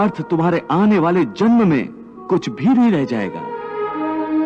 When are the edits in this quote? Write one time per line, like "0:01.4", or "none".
none